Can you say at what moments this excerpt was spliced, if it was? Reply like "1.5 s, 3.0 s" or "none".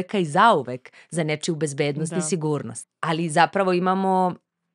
2.8 s